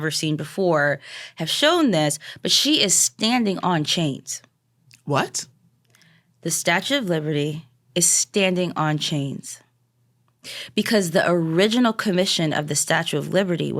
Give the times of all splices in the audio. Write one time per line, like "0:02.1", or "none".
none